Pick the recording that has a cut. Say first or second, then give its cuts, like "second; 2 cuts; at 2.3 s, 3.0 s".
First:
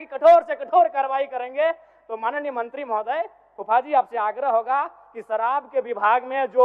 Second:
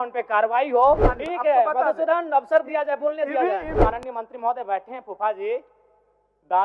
second; 2 cuts; at 1.1 s, 3.8 s